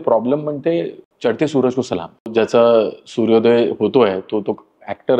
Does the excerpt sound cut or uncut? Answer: cut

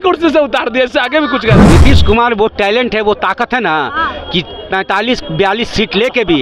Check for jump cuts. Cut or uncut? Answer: cut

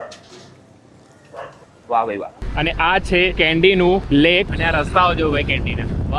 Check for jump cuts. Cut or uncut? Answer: cut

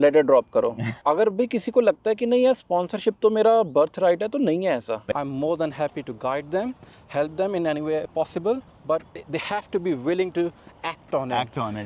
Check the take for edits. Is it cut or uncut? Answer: cut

